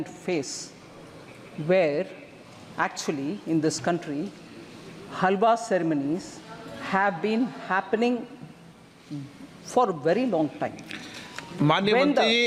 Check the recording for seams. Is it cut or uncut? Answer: uncut